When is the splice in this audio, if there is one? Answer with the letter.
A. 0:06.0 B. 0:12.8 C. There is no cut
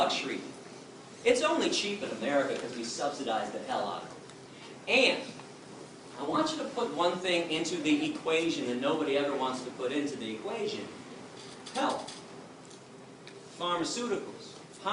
B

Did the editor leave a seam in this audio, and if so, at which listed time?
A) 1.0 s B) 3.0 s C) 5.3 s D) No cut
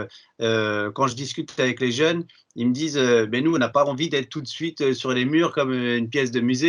D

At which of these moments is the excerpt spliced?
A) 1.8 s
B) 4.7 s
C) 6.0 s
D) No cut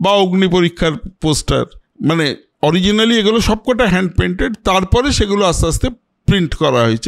A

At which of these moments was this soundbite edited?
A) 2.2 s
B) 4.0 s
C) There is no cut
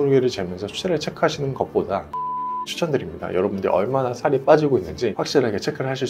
A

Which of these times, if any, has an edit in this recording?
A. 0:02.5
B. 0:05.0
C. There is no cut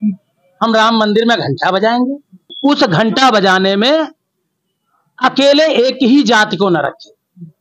A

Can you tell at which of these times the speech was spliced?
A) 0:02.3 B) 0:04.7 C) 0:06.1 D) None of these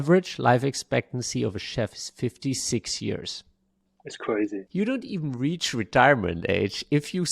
B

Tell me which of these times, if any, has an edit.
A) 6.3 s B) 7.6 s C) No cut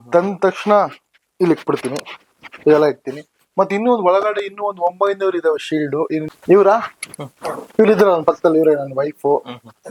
A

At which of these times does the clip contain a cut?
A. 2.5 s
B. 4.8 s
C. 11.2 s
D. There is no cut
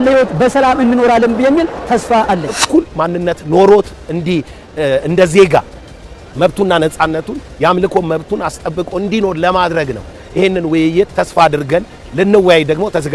A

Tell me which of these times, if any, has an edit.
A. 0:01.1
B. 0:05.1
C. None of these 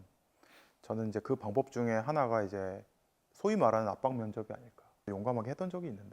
B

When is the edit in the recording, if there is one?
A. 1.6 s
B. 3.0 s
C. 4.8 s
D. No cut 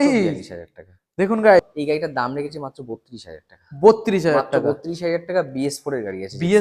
A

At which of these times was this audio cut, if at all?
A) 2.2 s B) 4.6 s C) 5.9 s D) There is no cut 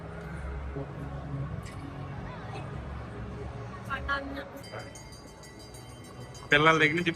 B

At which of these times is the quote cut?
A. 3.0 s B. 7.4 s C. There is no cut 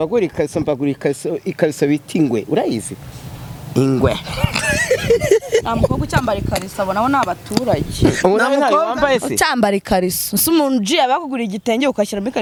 C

